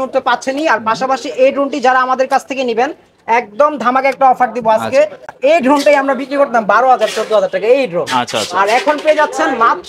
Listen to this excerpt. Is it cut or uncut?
cut